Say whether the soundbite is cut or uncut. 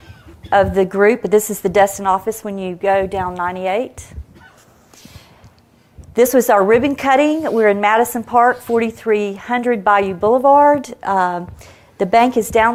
uncut